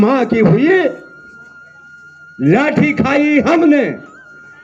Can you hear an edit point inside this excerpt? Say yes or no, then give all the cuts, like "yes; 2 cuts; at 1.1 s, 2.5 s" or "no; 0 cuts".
no; 0 cuts